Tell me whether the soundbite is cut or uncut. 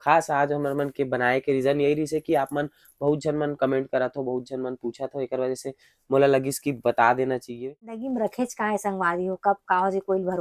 cut